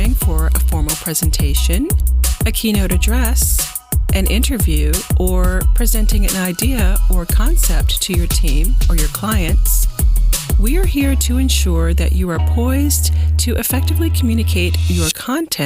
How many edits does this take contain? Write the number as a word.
zero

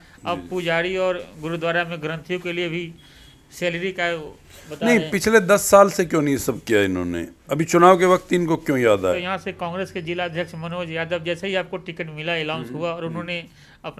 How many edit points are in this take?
one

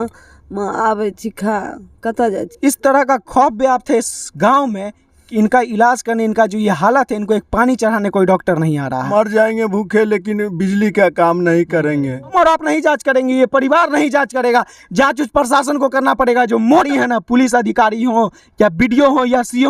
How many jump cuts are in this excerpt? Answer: four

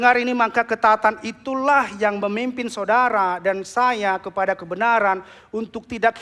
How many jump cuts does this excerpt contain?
zero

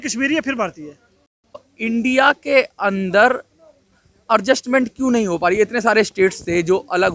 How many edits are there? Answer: one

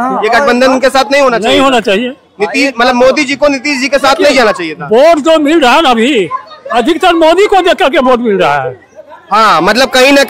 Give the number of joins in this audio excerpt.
zero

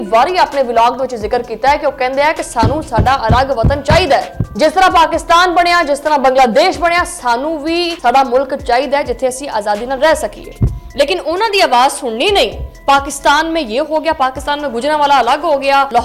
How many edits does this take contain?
zero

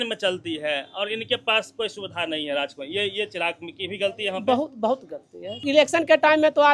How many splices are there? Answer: one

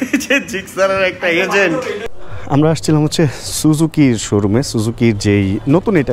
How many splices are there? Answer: one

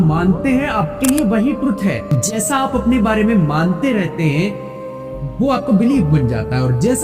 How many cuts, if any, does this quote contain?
one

